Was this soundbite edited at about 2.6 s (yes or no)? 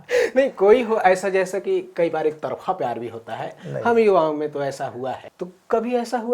no